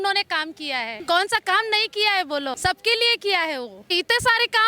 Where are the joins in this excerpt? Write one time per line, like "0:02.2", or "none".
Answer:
0:00.9
0:02.6
0:03.9